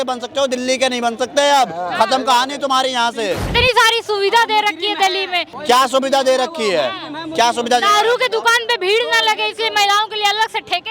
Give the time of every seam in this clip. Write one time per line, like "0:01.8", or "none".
0:03.5
0:05.5